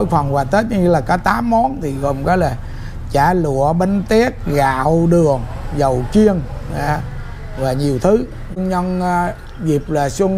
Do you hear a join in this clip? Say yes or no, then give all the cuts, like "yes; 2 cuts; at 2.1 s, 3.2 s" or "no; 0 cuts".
yes; 1 cut; at 8.6 s